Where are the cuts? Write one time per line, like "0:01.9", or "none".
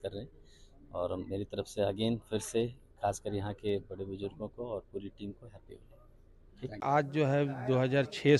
0:06.8